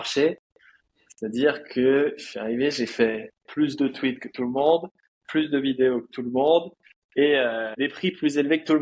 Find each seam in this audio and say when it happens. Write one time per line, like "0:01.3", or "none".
0:07.7